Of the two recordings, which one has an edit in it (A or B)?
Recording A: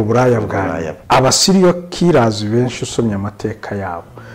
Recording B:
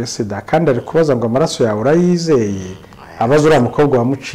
A